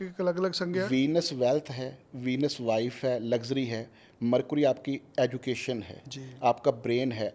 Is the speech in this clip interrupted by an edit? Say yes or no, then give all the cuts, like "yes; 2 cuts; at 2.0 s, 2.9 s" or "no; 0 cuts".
no; 0 cuts